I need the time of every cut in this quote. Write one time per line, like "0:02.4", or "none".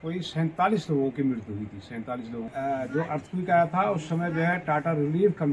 0:02.5